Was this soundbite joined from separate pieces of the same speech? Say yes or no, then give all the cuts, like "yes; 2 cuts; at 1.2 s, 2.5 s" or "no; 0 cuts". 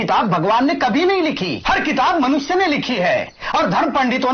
yes; 1 cut; at 1.5 s